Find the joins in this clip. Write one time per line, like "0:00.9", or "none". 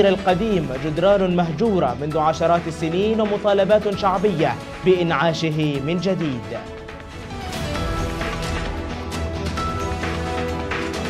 0:06.9